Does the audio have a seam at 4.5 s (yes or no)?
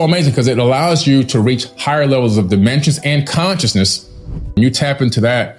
yes